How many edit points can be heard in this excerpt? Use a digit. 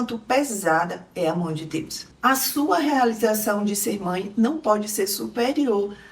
1